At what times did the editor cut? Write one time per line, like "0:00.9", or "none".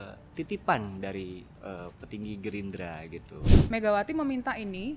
0:03.6